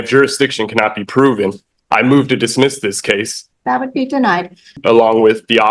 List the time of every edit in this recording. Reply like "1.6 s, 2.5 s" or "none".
3.4 s, 4.8 s